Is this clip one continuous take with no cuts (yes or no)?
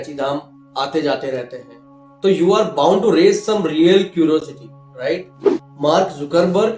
no